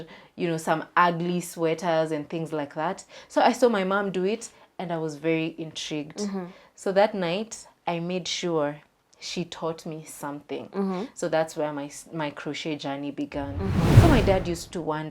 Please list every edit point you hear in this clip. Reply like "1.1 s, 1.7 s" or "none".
14.0 s

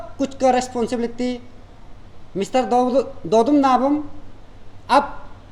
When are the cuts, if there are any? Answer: none

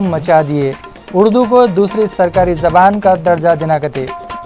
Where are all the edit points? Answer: none

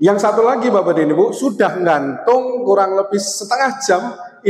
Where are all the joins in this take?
none

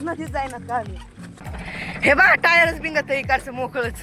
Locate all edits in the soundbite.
1.5 s

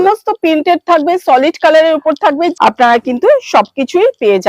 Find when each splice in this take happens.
2.5 s

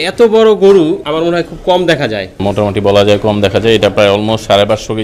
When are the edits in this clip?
1.0 s, 2.4 s

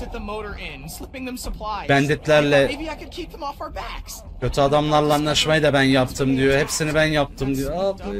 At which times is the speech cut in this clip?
none

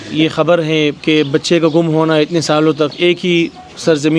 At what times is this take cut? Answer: 1.0 s

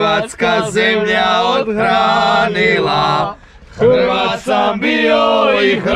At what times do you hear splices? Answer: none

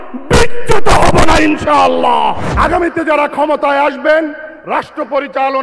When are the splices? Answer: 2.5 s

